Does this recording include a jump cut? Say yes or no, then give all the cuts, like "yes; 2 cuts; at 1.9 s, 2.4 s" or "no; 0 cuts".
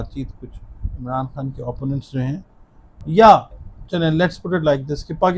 yes; 1 cut; at 0.9 s